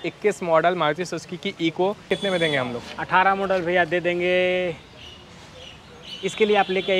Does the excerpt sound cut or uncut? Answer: cut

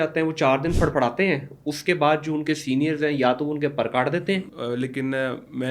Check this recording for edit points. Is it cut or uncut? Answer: cut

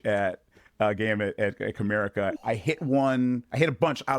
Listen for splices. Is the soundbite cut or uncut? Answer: cut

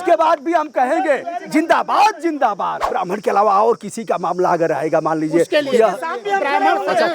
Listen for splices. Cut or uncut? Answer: cut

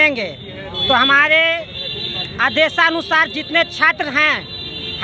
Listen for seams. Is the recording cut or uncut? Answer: uncut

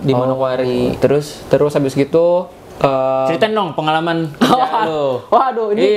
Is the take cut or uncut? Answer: uncut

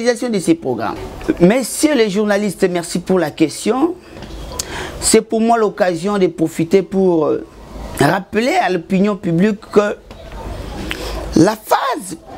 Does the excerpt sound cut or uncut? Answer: uncut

